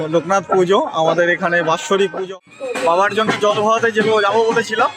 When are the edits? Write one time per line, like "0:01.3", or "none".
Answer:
0:02.2